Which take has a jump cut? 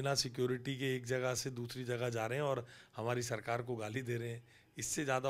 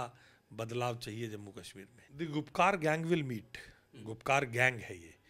second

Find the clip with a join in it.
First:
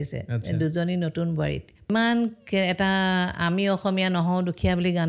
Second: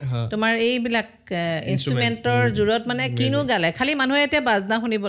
first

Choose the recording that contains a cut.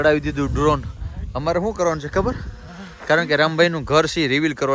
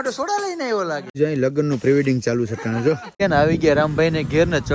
second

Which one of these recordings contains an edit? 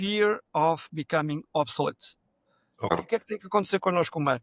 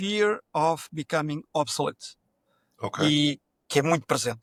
first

